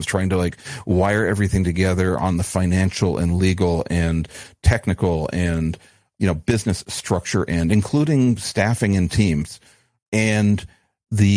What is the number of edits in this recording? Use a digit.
2